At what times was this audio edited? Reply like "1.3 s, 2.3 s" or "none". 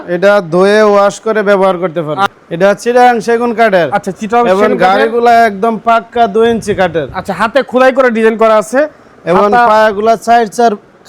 2.3 s